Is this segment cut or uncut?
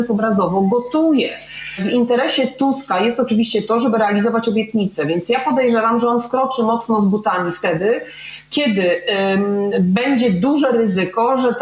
cut